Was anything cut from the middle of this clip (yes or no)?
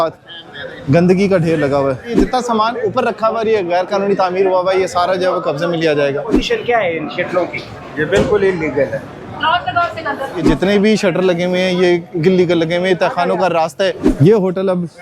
yes